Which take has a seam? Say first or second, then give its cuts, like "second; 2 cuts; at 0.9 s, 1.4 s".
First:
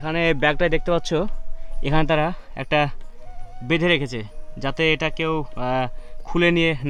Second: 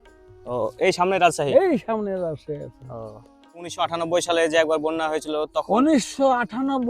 second; 1 cut; at 3.8 s